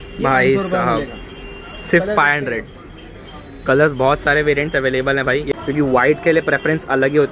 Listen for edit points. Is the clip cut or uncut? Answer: cut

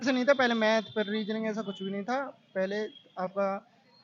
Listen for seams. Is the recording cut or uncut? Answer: uncut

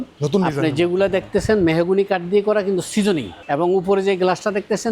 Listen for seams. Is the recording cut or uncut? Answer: cut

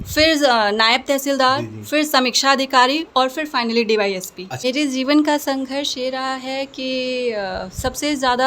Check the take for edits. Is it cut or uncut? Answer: cut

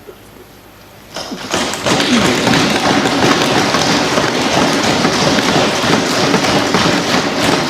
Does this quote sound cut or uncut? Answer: uncut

